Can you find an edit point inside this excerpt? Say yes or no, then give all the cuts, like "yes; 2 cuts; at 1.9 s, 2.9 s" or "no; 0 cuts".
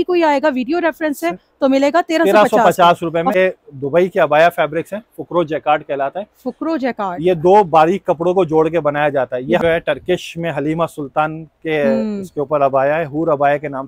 yes; 2 cuts; at 3.3 s, 9.6 s